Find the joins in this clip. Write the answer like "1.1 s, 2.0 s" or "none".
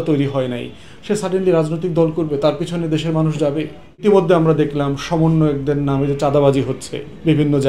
4.0 s